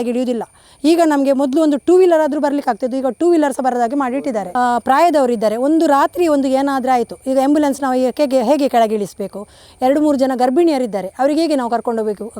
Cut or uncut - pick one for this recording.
cut